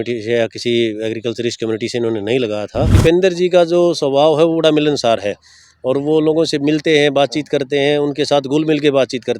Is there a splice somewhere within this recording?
yes; 1 cut; at 3.0 s

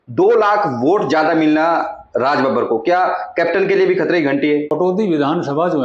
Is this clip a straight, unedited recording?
no; 1 cut; at 4.7 s

